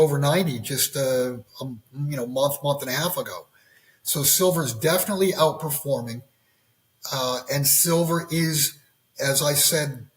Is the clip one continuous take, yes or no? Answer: yes